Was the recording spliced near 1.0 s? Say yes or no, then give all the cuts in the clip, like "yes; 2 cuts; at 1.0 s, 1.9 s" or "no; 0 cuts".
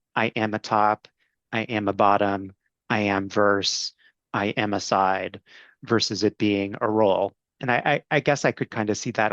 no; 2 cuts; at 5.7 s, 8.0 s